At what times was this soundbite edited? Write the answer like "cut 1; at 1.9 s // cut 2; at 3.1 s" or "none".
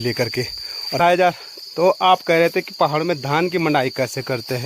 cut 1; at 1.0 s